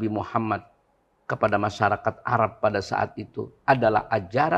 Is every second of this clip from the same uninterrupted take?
yes; 0 cuts

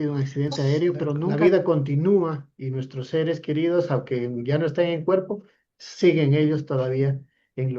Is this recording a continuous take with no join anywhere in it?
no; 1 cut; at 1.3 s

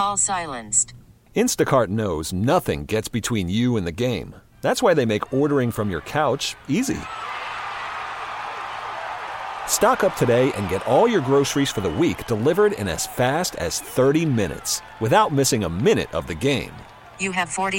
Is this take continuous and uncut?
yes; 0 cuts

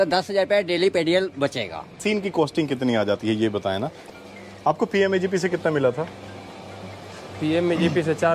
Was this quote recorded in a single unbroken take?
no; 2 cuts; at 2.0 s, 4.0 s

